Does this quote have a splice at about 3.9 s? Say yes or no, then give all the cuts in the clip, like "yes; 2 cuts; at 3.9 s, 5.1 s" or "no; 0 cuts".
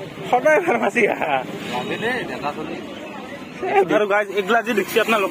yes; 1 cut; at 3.9 s